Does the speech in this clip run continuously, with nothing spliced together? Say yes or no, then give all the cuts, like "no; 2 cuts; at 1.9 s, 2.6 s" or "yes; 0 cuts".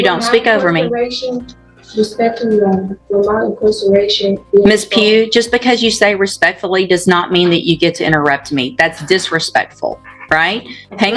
yes; 0 cuts